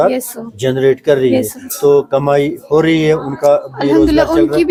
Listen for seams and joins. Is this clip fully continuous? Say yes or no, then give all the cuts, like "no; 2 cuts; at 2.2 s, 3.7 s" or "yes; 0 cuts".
yes; 0 cuts